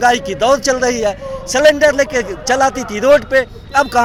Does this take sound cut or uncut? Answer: uncut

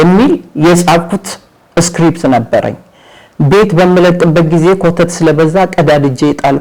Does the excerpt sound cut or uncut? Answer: uncut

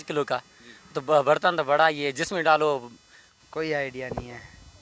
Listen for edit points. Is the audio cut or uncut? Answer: cut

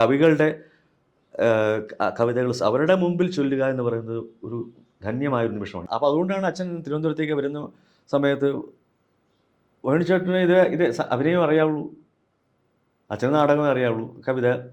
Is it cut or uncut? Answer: cut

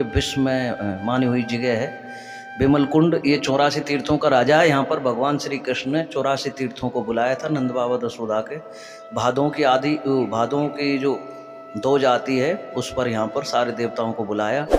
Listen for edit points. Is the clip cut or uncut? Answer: uncut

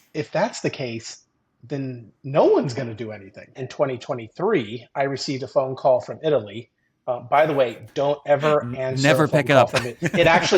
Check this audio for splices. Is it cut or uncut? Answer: cut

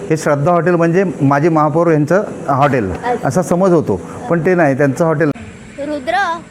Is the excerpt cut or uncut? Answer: cut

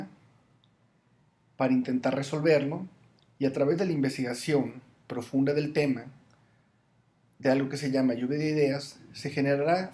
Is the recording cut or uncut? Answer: cut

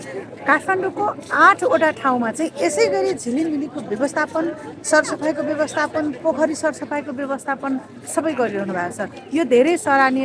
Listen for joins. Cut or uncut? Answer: uncut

